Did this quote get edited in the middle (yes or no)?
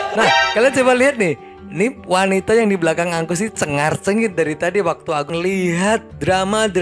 yes